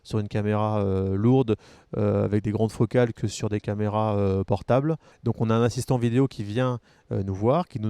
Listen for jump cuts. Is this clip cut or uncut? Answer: cut